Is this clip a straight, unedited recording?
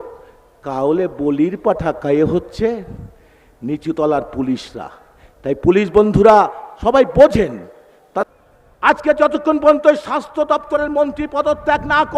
no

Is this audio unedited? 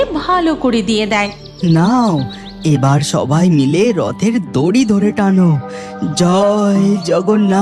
no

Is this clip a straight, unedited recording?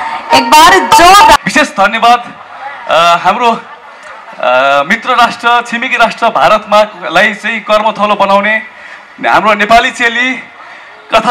no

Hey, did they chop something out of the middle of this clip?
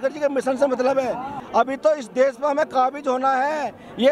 yes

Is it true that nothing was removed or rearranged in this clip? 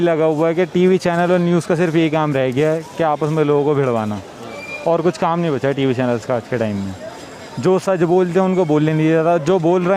yes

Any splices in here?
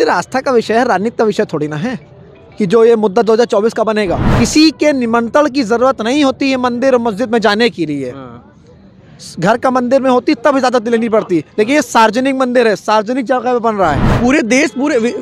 yes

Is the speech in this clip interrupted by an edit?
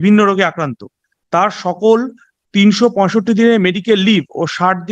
no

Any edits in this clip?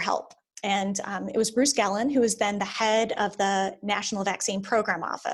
no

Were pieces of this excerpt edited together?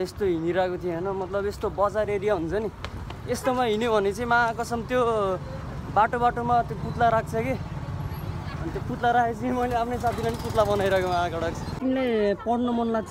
yes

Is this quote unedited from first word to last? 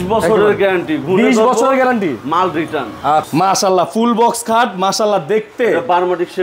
no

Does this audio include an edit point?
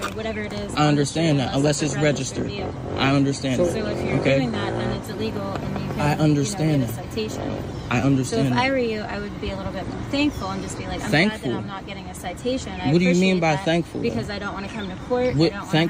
no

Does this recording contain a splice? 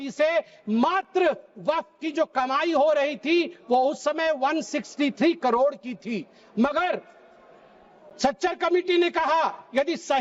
no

